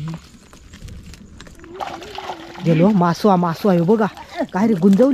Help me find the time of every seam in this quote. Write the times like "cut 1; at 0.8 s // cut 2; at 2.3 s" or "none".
cut 1; at 1.6 s